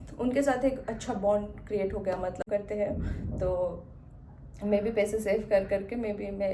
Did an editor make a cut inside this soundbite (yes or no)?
yes